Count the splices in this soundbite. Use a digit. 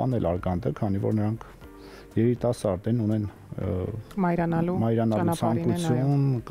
0